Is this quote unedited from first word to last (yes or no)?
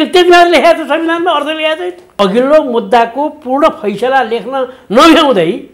no